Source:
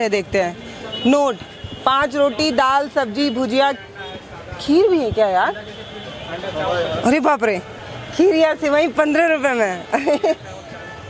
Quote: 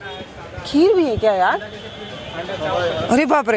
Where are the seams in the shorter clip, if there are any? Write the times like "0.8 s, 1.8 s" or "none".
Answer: none